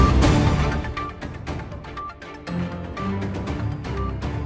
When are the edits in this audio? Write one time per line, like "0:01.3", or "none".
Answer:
0:02.0